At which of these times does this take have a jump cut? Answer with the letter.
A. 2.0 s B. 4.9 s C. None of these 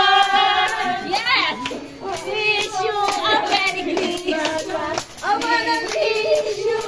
C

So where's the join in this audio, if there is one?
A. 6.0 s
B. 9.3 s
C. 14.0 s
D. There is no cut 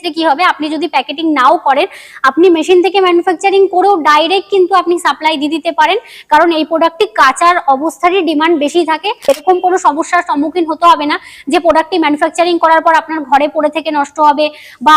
B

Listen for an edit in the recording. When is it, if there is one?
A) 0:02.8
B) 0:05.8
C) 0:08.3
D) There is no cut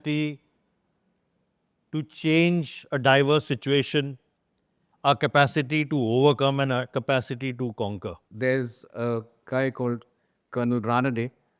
C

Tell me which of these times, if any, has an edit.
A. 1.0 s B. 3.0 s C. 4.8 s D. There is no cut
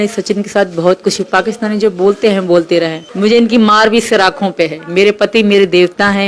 B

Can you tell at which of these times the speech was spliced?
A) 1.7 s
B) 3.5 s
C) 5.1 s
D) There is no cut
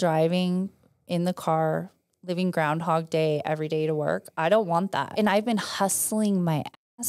C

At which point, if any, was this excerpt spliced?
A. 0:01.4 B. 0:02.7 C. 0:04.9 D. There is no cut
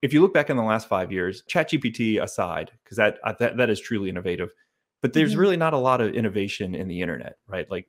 A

